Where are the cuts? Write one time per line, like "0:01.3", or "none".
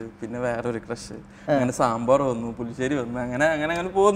none